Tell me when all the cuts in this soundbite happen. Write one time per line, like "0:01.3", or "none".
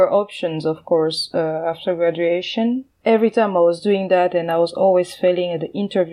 0:02.9